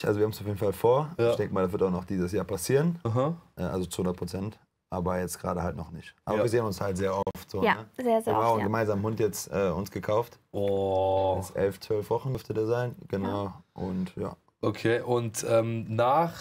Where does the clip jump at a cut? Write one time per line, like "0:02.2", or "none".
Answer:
none